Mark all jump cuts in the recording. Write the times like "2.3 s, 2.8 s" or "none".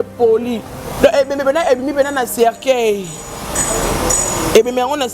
1.0 s